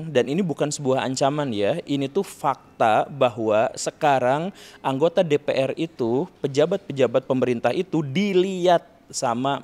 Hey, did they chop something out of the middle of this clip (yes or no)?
no